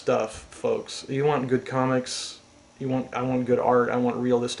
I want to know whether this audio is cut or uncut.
cut